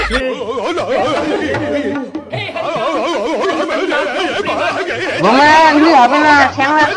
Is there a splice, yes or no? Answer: no